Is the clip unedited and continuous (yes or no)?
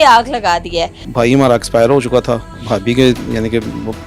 no